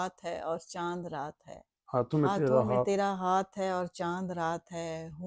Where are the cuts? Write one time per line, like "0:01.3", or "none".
none